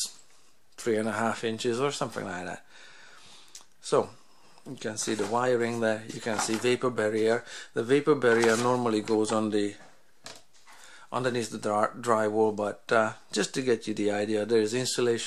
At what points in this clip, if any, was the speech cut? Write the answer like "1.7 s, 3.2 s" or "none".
none